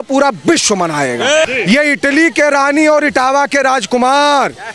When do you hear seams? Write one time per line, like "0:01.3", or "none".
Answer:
0:01.4